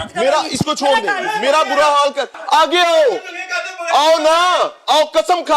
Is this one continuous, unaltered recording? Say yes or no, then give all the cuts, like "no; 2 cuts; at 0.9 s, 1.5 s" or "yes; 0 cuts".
no; 1 cut; at 2.3 s